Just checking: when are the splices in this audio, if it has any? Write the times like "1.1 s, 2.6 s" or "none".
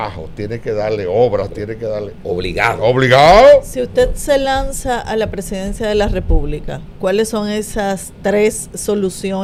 none

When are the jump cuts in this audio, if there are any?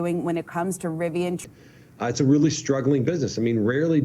1.4 s

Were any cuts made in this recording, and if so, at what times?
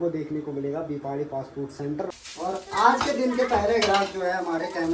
2.1 s

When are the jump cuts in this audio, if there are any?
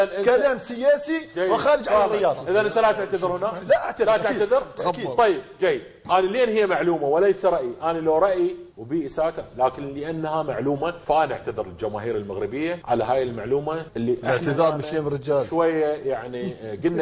none

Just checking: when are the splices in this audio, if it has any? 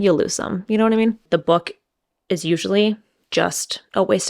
1.2 s

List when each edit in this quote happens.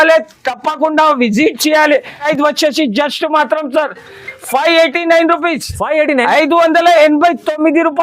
2.2 s

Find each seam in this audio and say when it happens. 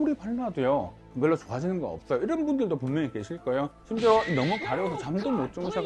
1.1 s, 3.8 s

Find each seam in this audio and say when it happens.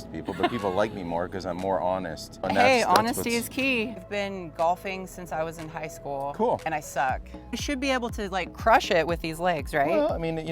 2.4 s, 4.0 s, 7.6 s

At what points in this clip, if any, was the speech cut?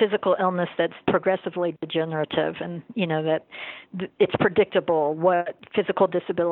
1.0 s, 5.6 s

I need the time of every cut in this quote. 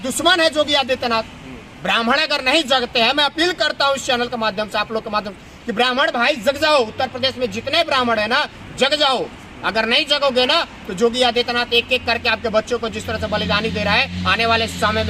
none

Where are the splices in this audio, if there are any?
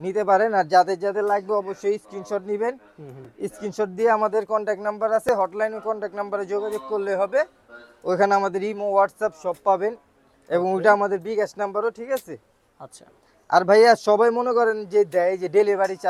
none

